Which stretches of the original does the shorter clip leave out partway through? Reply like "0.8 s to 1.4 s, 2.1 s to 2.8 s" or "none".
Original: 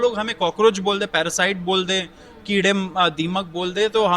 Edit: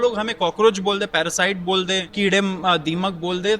2.1 s to 2.4 s